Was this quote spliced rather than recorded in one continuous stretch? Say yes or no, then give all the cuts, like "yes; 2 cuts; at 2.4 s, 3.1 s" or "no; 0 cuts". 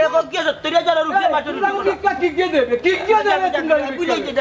no; 0 cuts